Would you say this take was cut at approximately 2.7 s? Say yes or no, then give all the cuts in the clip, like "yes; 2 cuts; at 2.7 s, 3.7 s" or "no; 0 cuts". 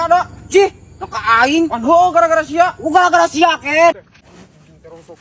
no; 1 cut; at 4.1 s